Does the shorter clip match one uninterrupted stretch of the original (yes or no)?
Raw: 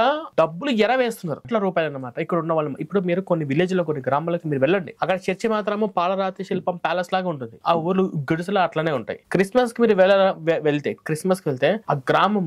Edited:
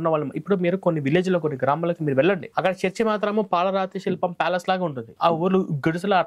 yes